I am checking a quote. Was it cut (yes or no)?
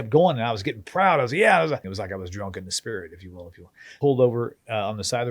yes